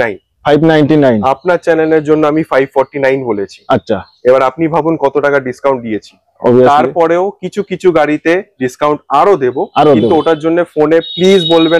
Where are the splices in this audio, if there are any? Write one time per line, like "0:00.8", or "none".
none

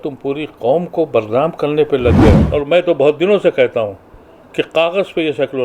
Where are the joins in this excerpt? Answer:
0:02.4

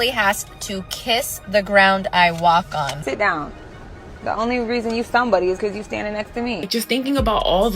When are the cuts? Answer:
0:03.0
0:06.7

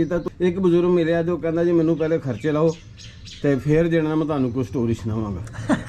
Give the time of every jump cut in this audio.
none

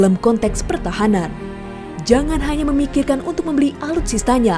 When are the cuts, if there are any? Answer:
none

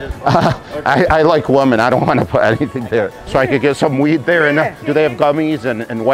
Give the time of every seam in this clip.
0:03.2
0:04.8

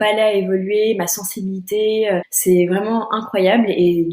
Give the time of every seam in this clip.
0:02.3

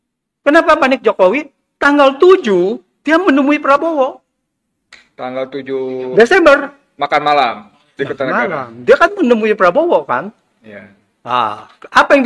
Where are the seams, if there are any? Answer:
none

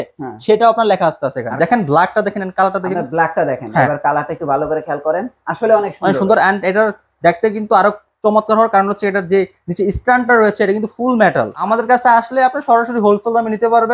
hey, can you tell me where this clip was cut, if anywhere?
0:01.5
0:11.6

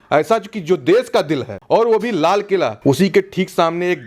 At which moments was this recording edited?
0:01.5
0:02.8

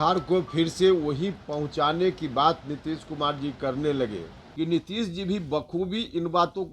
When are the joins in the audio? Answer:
0:04.4

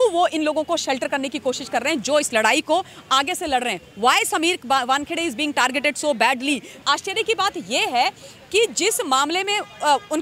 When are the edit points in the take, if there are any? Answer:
0:06.8

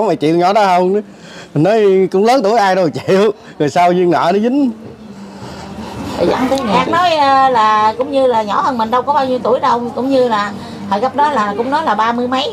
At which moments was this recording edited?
0:06.7

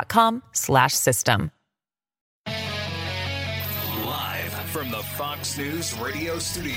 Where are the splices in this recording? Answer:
0:02.2
0:03.9

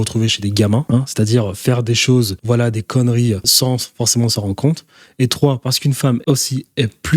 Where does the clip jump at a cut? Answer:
0:00.8
0:02.4
0:03.5
0:06.2

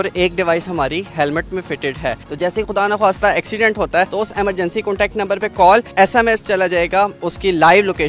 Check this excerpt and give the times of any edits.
0:02.2
0:04.1
0:05.9
0:07.2

